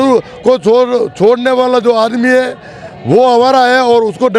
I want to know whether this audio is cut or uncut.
uncut